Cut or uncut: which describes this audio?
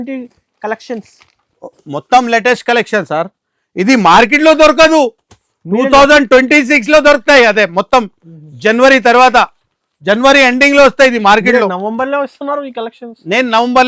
uncut